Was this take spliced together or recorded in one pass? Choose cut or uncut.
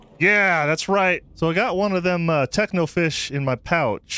cut